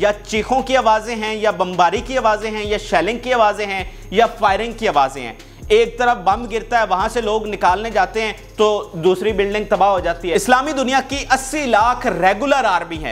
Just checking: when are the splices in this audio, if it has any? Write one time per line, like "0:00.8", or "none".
0:10.3